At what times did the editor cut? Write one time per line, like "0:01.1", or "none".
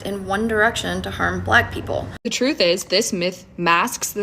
0:02.2